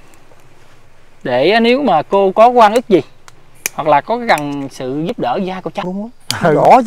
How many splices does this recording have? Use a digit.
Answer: 1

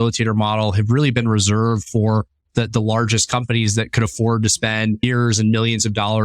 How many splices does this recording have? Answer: 1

